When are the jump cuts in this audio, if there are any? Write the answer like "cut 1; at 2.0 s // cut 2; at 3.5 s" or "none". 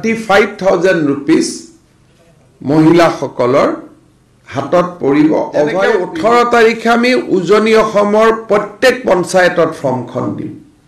cut 1; at 5.8 s